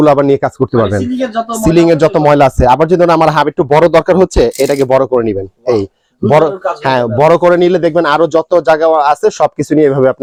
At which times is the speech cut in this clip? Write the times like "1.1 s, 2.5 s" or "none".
none